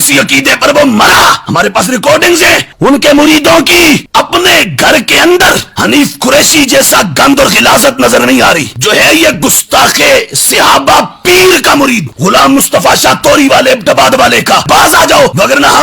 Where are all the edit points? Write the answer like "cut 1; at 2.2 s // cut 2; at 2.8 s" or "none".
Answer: cut 1; at 4.0 s // cut 2; at 14.6 s